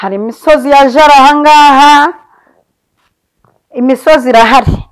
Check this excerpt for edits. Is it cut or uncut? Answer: uncut